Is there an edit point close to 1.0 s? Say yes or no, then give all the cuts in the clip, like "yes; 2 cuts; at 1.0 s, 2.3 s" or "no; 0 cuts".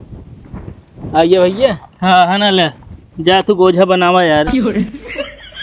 no; 1 cut; at 4.5 s